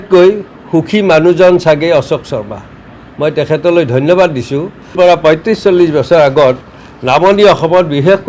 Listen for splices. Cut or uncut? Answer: cut